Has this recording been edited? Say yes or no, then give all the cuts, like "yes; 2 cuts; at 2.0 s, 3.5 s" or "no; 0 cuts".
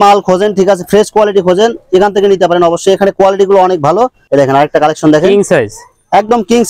yes; 1 cut; at 4.2 s